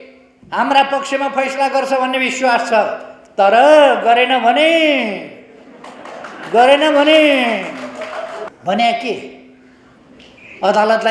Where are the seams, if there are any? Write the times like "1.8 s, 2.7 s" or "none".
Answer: 8.5 s